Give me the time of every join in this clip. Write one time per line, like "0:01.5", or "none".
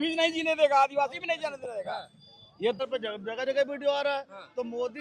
0:02.8